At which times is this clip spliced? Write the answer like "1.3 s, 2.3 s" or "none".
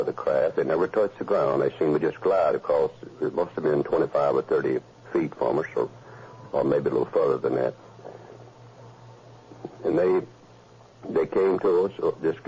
none